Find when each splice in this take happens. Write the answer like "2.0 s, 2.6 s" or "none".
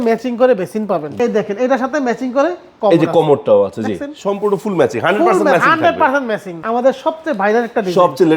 1.1 s, 6.5 s

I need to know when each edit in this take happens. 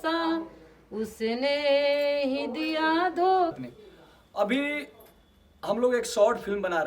3.6 s

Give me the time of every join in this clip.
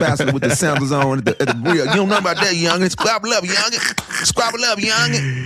none

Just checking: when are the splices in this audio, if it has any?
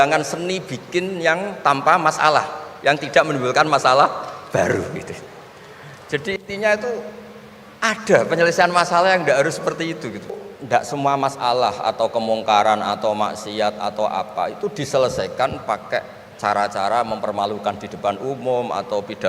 10.3 s

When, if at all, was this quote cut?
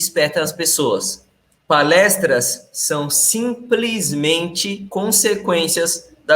4.7 s

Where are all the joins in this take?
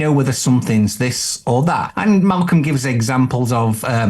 1.9 s

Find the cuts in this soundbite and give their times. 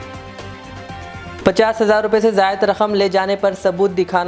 1.4 s

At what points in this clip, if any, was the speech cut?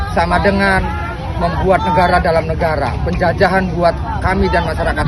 none

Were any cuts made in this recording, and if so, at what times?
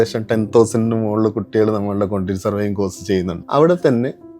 3.4 s

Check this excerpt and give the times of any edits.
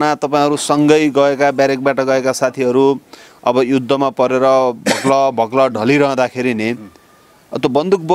none

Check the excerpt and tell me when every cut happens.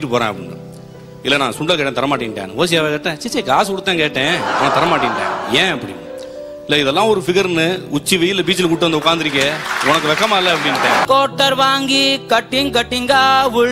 11.0 s

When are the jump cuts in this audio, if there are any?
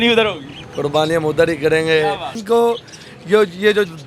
2.4 s

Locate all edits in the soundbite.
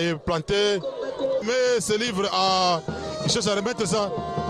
1.4 s

